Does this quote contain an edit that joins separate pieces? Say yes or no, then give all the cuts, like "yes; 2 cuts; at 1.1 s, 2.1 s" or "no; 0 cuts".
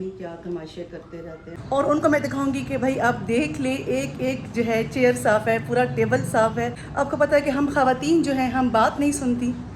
yes; 2 cuts; at 1.6 s, 6.8 s